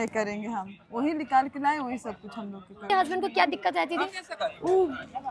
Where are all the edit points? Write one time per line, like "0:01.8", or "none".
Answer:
0:02.9